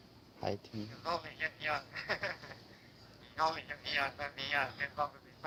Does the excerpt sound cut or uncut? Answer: uncut